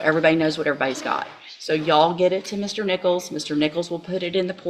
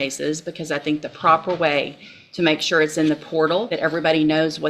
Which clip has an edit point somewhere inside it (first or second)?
second